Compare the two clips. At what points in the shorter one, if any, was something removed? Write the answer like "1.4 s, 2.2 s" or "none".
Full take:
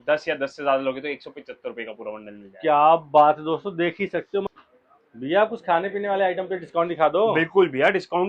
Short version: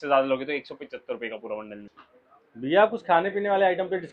2.0 s